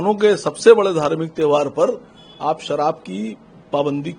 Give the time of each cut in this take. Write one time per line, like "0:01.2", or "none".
none